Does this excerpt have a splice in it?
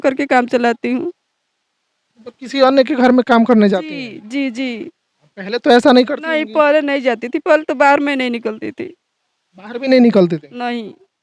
no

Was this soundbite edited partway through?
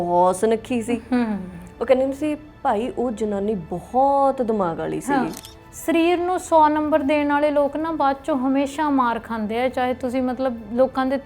yes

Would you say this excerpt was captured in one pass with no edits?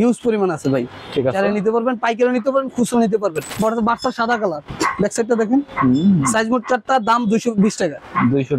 no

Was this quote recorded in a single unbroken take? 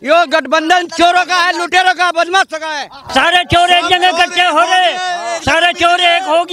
no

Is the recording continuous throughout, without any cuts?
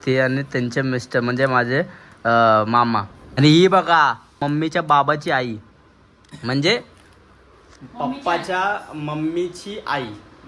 no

